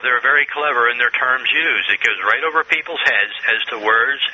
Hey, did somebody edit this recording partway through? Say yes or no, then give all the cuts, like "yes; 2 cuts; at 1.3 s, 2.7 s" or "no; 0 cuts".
yes; 1 cut; at 1.7 s